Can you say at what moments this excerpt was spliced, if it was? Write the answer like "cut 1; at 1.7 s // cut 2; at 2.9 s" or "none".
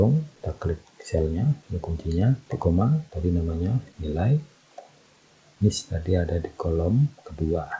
cut 1; at 5.5 s